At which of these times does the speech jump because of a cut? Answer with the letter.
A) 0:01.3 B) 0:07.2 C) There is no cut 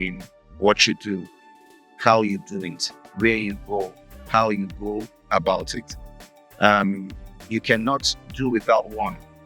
C